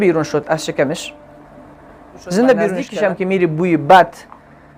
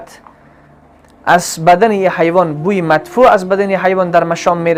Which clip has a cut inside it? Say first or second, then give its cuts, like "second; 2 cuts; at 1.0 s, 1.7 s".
first; 1 cut; at 2.8 s